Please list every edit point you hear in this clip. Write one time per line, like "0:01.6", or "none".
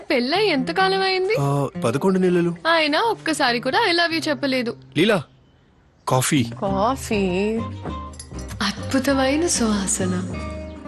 none